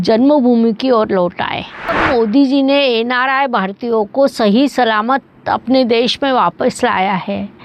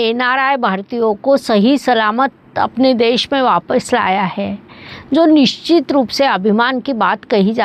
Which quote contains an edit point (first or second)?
first